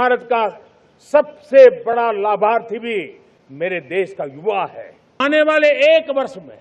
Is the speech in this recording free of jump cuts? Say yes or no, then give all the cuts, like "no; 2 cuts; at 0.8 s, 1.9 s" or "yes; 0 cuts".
no; 1 cut; at 5.2 s